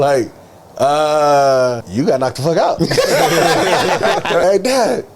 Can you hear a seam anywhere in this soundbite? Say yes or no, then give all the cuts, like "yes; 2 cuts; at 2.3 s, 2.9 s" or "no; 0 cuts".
yes; 2 cuts; at 1.8 s, 4.4 s